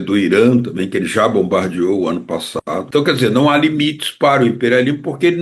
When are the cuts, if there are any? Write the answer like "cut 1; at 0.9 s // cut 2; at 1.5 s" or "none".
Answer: cut 1; at 2.8 s